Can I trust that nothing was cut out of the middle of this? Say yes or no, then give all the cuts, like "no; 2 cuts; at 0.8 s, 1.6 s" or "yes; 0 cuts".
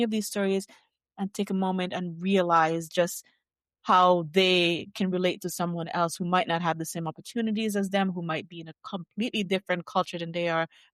yes; 0 cuts